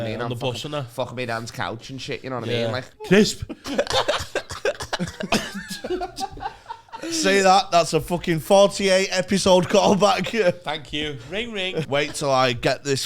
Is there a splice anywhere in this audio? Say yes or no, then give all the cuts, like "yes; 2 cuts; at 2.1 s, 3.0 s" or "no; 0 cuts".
yes; 2 cuts; at 2.9 s, 11.8 s